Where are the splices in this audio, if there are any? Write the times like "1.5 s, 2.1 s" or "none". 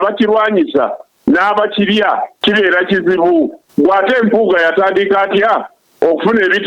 2.3 s, 3.6 s